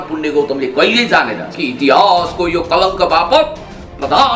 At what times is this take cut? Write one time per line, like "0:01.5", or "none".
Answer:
0:01.4